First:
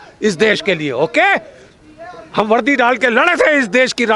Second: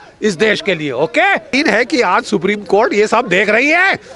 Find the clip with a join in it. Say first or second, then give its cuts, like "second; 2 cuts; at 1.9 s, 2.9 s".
second; 1 cut; at 1.5 s